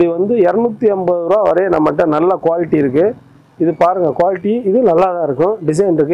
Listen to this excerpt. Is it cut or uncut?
uncut